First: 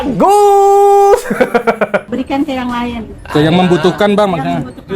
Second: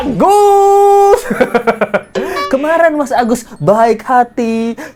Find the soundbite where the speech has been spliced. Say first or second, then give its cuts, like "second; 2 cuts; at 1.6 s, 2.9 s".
first; 1 cut; at 2.1 s